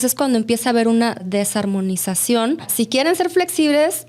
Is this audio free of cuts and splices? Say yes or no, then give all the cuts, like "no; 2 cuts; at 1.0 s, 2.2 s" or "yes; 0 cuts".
no; 2 cuts; at 1.2 s, 2.7 s